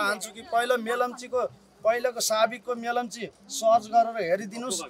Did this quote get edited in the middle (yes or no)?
no